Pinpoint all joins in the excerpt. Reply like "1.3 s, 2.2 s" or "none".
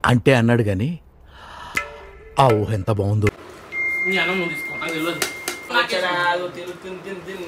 3.3 s